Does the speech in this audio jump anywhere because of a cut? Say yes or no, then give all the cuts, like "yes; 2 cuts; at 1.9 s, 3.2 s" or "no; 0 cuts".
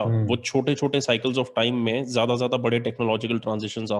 no; 0 cuts